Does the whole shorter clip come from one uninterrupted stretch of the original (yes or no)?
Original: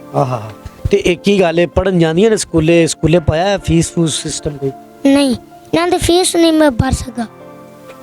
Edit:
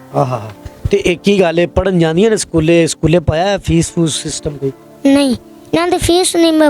yes